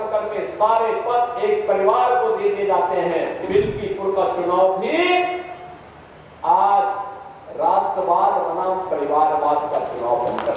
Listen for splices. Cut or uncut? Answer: cut